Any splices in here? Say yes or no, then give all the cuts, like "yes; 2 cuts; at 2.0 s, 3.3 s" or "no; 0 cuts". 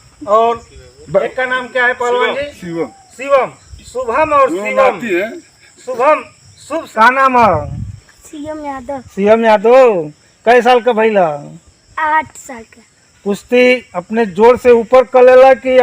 yes; 1 cut; at 6.9 s